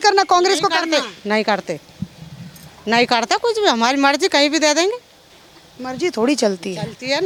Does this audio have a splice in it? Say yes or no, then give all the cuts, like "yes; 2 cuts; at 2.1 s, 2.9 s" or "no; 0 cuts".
no; 0 cuts